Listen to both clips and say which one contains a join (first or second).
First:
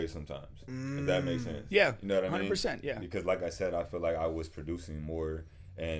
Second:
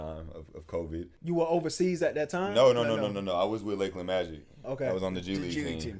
second